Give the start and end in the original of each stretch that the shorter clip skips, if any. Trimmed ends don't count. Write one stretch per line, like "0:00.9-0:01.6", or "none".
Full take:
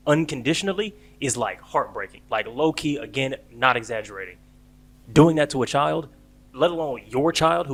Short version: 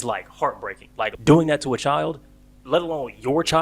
0:02.5-0:05.0